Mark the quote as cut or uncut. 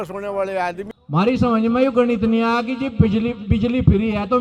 cut